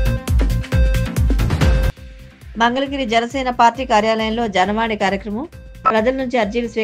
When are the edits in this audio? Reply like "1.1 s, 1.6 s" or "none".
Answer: 1.9 s

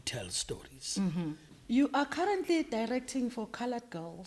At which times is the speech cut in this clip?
1.5 s

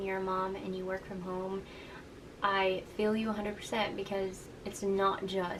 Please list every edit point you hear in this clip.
none

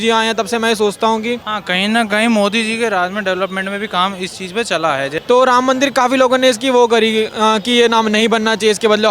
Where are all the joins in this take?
1.5 s, 5.1 s

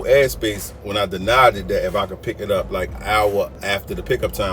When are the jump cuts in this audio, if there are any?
3.0 s, 3.6 s

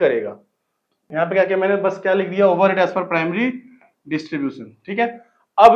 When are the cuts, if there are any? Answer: 1.0 s

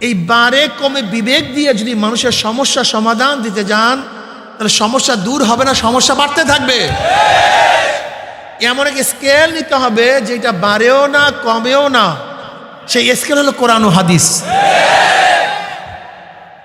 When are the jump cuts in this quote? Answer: none

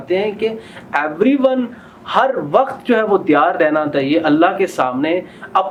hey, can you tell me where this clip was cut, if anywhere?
none

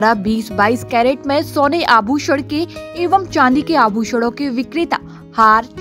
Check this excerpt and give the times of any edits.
none

